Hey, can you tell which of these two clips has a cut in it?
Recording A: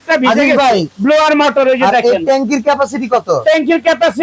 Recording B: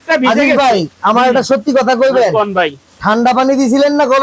A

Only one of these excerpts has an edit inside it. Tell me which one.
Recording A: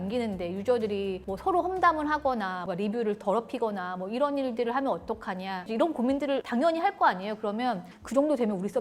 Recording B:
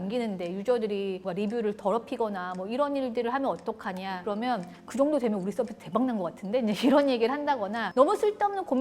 B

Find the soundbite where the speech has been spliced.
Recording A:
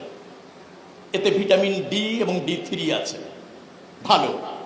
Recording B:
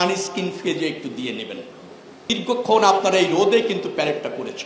B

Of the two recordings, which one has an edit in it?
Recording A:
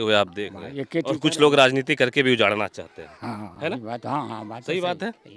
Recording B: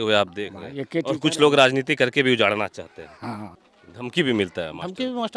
B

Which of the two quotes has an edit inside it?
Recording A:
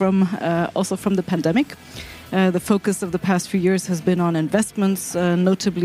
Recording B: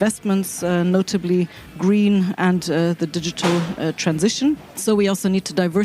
B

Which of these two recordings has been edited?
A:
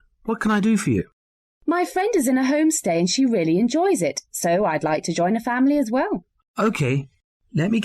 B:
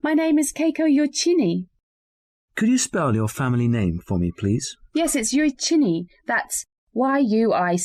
A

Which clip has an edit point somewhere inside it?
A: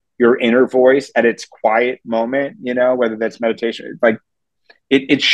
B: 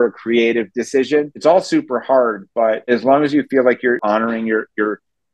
B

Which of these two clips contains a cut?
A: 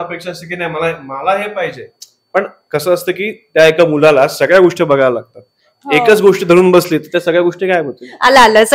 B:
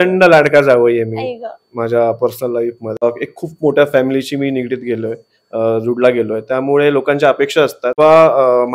B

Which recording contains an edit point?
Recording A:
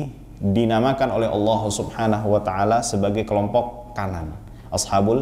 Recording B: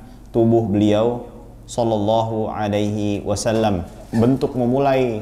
B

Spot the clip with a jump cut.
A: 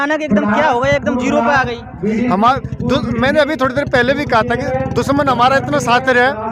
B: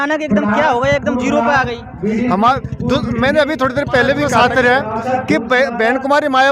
B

